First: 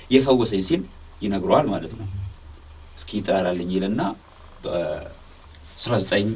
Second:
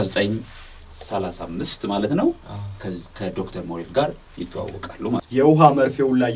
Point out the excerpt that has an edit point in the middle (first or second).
second